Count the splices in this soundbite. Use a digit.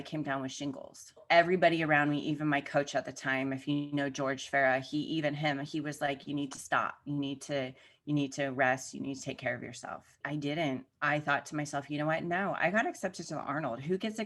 2